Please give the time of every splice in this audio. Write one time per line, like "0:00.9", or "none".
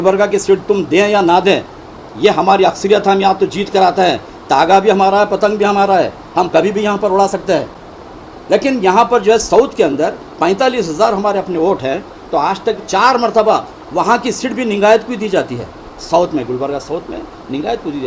none

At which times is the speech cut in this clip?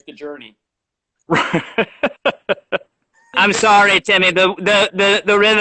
0:03.2

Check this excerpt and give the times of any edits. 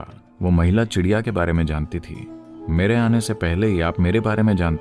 none

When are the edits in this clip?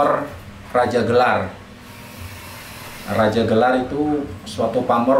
none

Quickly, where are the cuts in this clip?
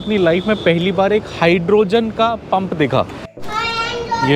0:03.2

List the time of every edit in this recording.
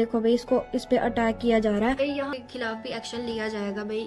0:02.3

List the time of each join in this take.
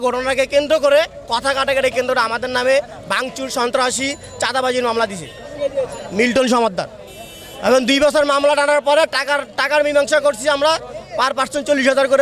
none

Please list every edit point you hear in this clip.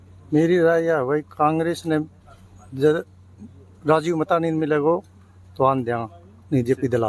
none

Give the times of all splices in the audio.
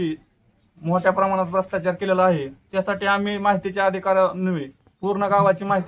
none

